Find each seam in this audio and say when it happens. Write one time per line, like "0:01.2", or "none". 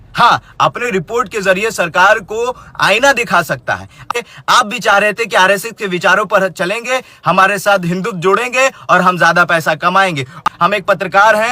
0:04.1
0:10.4